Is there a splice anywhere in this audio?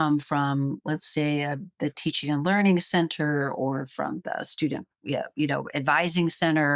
no; 0 cuts

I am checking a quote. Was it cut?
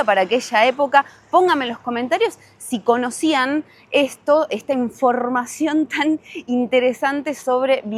no; 0 cuts

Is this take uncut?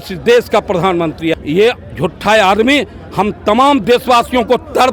no; 1 cut; at 1.4 s

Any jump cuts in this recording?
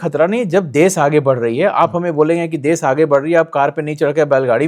no; 0 cuts

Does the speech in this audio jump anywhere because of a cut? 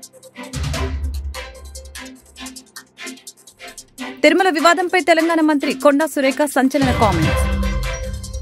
no; 0 cuts

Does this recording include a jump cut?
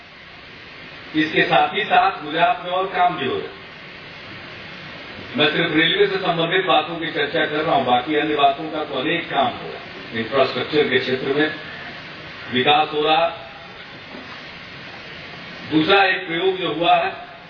no; 0 cuts

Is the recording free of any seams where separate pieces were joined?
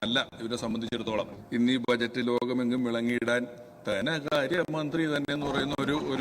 no; 1 cut; at 1.4 s

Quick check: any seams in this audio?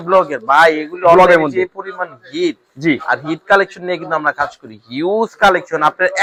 no; 0 cuts

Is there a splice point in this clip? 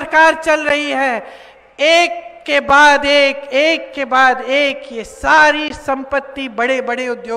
no; 0 cuts

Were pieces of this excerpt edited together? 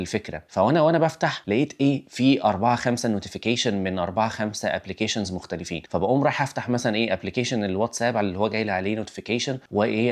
no; 0 cuts

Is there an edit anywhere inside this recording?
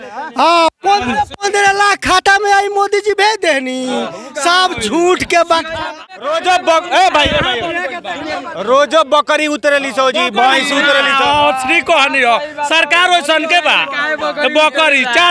yes; 1 cut; at 5.9 s

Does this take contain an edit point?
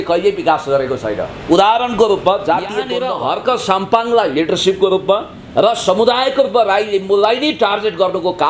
yes; 1 cut; at 2.9 s

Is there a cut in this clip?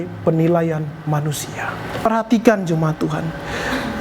yes; 1 cut; at 2.1 s

